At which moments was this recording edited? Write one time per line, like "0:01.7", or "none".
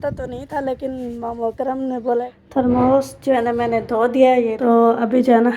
0:02.1
0:04.6